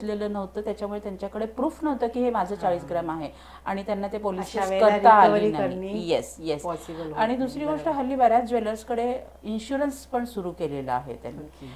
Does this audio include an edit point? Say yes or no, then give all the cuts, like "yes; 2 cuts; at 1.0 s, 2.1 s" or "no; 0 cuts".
no; 0 cuts